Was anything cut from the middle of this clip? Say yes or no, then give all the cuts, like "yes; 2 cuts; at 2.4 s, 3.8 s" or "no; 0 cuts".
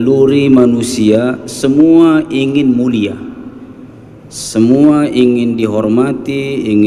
no; 0 cuts